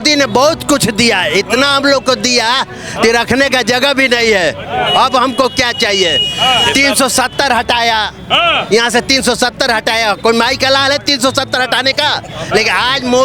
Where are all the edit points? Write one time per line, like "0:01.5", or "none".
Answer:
none